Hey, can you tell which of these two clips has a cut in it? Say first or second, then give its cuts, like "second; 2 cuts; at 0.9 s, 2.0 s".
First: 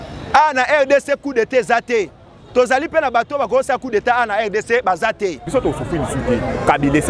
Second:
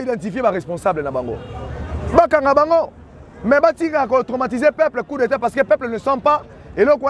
first; 1 cut; at 5.4 s